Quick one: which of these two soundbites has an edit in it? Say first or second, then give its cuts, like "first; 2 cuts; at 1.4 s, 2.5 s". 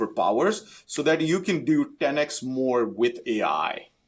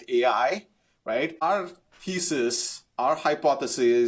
second; 1 cut; at 1.4 s